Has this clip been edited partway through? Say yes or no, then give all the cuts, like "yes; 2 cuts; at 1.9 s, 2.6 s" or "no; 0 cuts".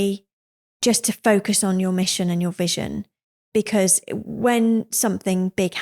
yes; 1 cut; at 3.4 s